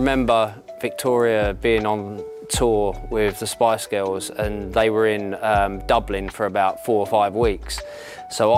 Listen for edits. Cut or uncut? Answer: uncut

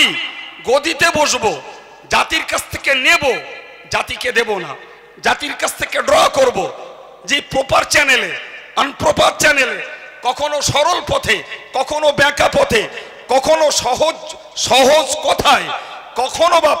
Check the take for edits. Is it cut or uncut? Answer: uncut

